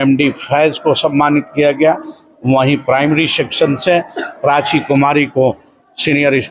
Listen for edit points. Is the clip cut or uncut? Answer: uncut